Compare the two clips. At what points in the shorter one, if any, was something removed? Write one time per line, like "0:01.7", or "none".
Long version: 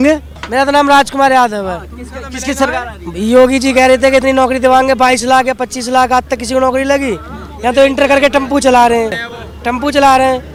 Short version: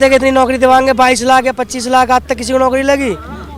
none